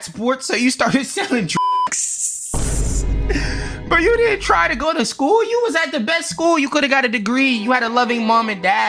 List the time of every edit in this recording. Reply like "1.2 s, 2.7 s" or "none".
none